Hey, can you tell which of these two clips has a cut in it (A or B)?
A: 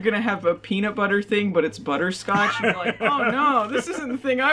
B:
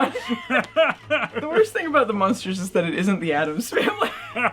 B